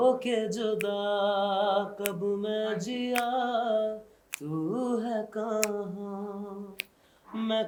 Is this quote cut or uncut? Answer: uncut